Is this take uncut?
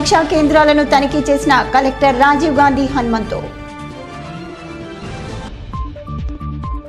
yes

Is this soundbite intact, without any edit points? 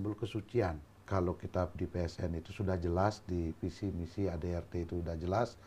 no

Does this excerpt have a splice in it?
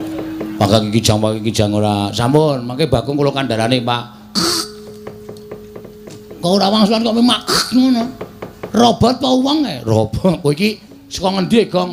yes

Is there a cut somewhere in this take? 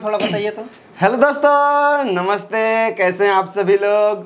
no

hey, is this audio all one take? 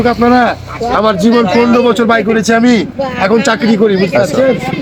yes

